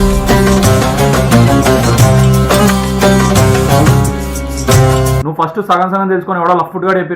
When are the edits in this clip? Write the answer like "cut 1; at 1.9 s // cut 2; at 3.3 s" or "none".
cut 1; at 5.3 s